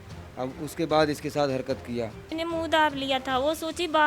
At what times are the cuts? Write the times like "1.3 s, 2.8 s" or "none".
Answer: 2.2 s